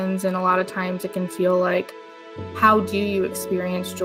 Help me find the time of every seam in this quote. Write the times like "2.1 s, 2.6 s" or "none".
none